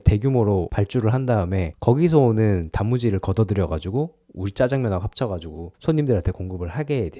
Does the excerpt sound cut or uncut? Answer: uncut